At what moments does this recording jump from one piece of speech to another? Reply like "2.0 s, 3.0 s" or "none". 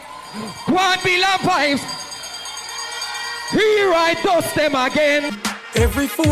5.3 s